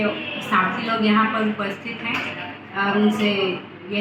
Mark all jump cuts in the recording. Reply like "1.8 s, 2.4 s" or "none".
none